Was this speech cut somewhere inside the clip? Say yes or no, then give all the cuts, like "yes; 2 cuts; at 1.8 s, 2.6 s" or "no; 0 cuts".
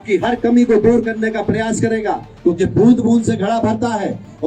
yes; 1 cut; at 2.3 s